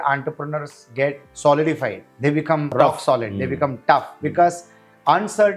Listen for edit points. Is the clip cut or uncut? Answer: cut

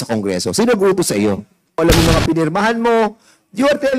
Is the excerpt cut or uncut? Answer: cut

